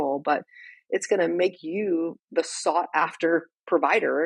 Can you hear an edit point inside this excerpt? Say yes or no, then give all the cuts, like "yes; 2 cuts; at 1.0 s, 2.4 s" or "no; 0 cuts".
no; 0 cuts